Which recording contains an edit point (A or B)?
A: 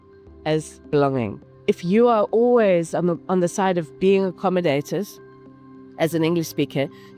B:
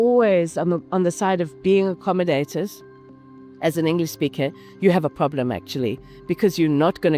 A